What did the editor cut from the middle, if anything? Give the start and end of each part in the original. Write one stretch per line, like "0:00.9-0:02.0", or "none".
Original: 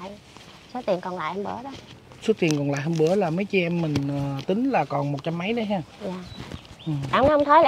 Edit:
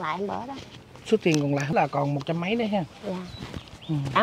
0:02.9-0:04.7

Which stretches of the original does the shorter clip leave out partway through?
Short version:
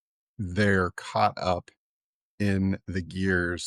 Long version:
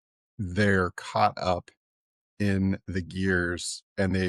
none

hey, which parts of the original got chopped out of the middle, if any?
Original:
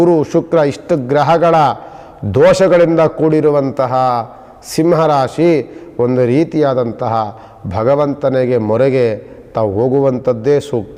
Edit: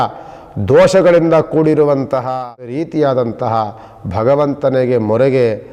0:04.5-0:06.4

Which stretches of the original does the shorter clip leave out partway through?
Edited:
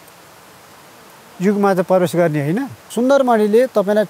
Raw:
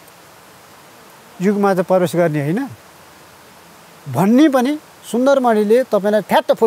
0:02.8-0:05.0

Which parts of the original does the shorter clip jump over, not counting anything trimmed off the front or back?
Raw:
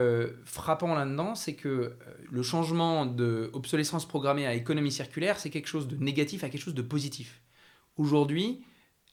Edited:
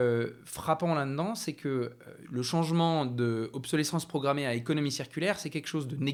none

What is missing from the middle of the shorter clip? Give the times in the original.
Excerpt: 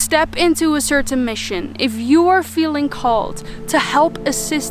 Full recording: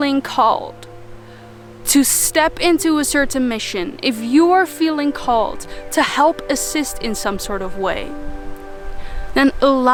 none

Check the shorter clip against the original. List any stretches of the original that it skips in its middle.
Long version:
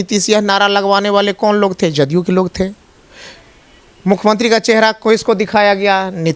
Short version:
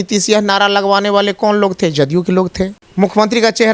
0:02.8-0:03.9

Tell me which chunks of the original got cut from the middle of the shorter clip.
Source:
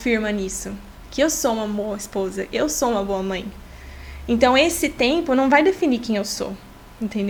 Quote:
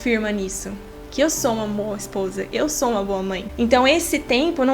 0:03.5-0:04.2

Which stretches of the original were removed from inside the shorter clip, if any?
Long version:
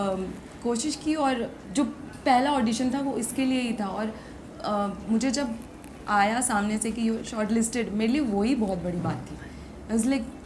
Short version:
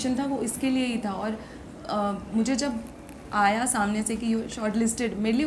none

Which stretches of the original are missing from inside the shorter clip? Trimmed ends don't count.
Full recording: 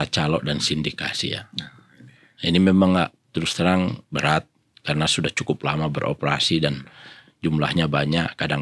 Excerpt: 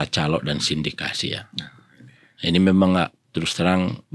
none

